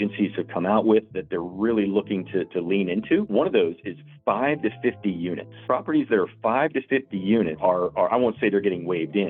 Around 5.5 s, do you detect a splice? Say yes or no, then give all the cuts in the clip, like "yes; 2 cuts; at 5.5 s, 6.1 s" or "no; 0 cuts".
yes; 3 cuts; at 3.3 s, 5.5 s, 7.6 s